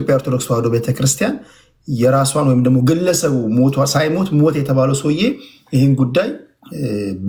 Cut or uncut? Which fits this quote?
uncut